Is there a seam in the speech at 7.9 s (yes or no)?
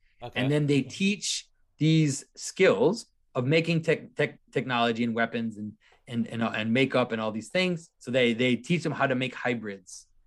yes